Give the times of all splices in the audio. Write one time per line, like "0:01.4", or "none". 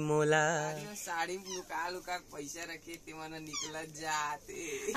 0:00.9

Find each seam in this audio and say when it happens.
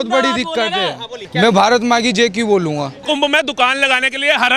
0:01.2
0:03.0

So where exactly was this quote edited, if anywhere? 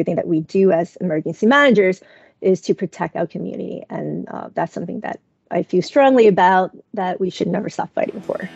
none

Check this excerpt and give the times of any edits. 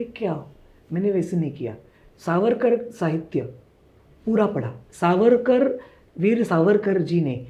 none

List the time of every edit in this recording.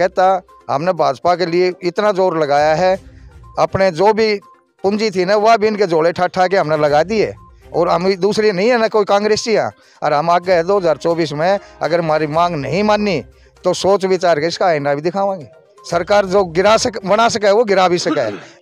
none

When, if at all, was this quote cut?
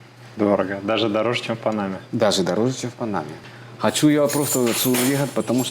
0:03.3

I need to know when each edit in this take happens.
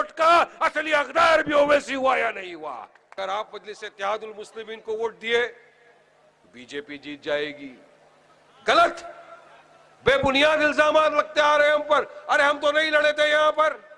0:03.1

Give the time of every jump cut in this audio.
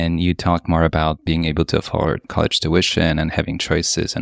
0:01.2
0:02.2

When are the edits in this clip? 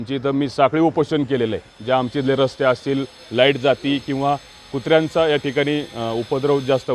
none

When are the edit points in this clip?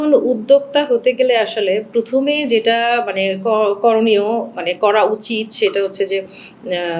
none

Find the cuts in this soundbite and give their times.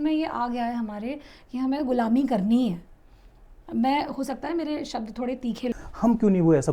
0:05.7

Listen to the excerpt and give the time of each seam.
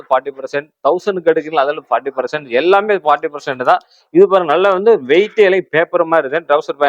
none

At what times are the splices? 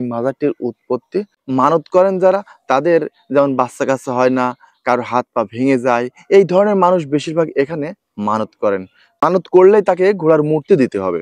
0:01.4
0:09.2

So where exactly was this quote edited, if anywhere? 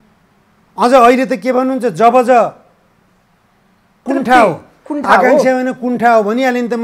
0:04.0

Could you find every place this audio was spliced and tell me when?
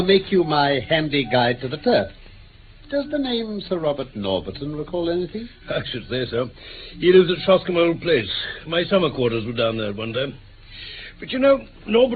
0:01.0

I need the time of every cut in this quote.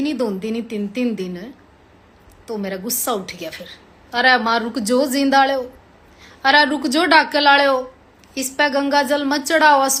none

